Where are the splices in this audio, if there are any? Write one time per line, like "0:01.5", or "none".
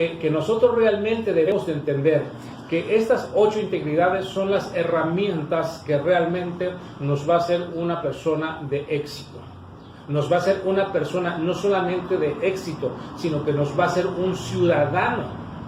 0:01.5